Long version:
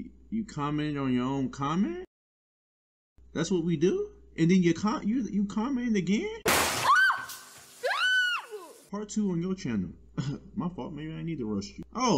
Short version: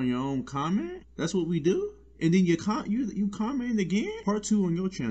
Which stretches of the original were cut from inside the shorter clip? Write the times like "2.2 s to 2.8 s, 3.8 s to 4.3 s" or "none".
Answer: 2.1 s to 3.2 s, 6.3 s to 8.8 s